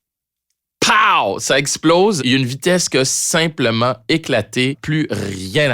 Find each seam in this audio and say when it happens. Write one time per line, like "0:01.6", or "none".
0:02.2
0:04.8